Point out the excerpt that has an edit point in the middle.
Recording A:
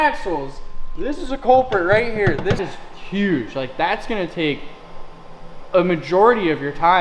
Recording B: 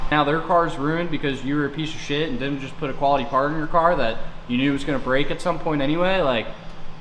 A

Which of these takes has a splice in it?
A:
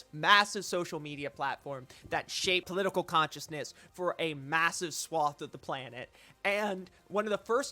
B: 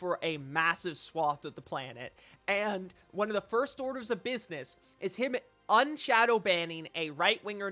A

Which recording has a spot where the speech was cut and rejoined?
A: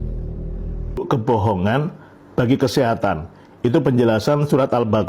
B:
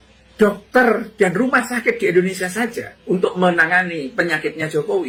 A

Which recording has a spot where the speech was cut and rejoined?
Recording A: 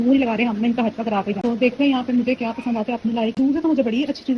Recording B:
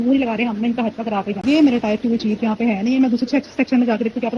B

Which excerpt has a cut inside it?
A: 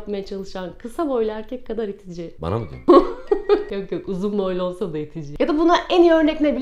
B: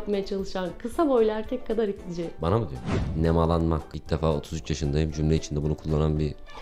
B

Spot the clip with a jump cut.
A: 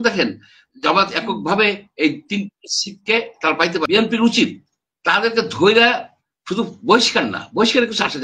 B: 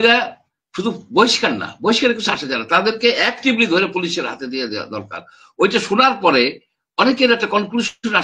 A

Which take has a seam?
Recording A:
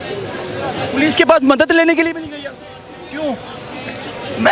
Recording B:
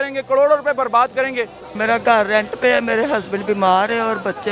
B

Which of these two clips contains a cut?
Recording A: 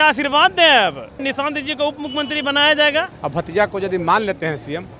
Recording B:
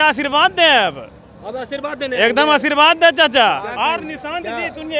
A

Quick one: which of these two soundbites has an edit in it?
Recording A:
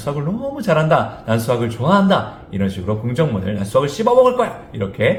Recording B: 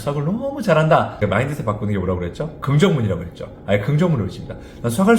B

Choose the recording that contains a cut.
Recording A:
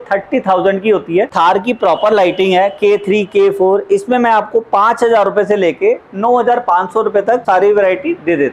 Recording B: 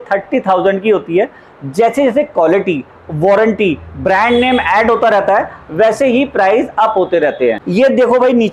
A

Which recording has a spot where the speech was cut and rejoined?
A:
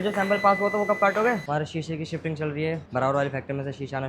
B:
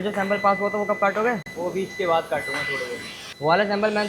A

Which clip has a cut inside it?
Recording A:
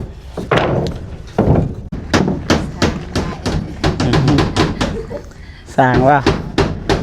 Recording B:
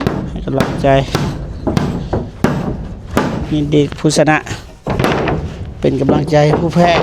A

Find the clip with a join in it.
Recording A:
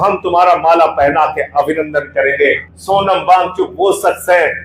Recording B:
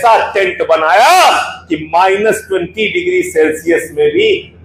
A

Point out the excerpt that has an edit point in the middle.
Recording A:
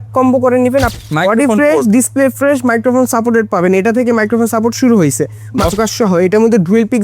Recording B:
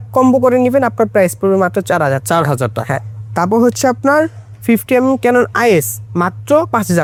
A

